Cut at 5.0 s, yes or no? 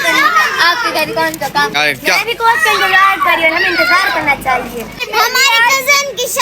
yes